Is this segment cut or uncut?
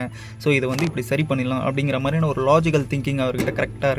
uncut